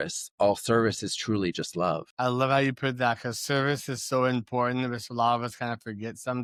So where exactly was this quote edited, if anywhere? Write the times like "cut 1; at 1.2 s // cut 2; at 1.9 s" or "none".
none